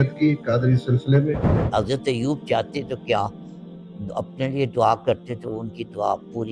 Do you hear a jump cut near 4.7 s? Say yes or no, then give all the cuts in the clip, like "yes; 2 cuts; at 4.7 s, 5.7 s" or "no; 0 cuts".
no; 1 cut; at 1.6 s